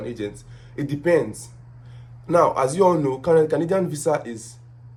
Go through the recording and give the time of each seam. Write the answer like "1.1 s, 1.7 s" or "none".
none

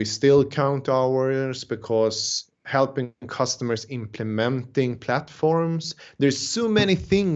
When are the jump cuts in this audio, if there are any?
none

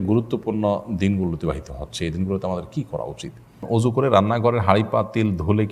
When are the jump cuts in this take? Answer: 3.6 s

